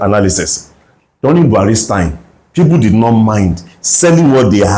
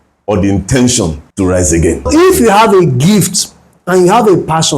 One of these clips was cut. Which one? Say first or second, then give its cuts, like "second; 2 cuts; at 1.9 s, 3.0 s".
second; 2 cuts; at 1.2 s, 2.1 s